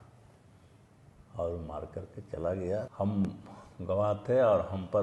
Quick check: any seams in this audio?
yes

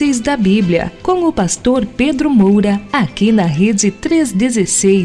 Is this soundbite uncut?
no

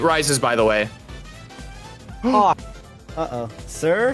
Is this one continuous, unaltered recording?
no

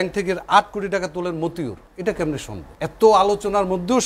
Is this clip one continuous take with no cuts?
no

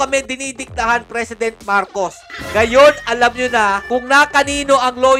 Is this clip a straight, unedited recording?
no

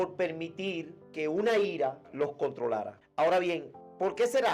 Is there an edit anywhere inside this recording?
no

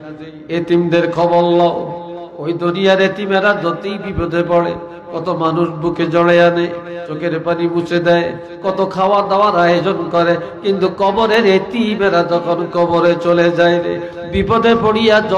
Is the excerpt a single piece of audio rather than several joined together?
yes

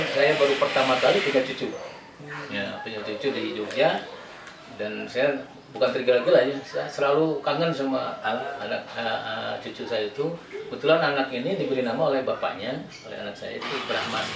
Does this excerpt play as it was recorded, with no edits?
yes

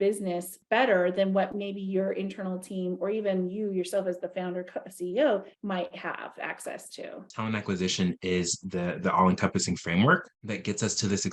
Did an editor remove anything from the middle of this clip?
yes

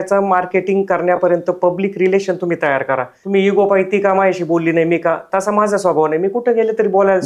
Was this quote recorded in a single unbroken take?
no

